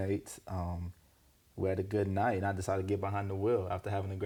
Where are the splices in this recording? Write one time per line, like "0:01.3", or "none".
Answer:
none